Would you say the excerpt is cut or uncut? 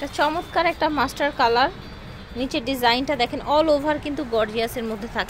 uncut